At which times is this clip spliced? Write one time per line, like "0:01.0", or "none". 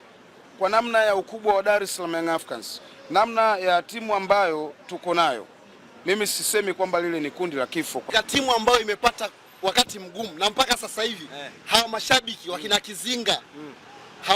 0:08.1